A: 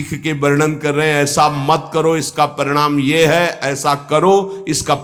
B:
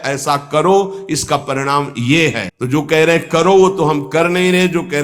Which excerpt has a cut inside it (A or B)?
B